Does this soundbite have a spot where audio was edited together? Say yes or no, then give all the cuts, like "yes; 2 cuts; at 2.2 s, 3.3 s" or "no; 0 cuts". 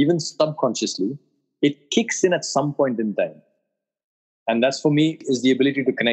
yes; 1 cut; at 5.2 s